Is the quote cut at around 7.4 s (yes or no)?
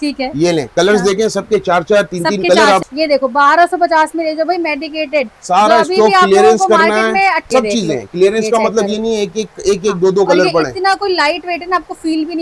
yes